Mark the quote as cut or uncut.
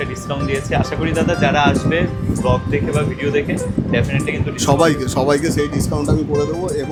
uncut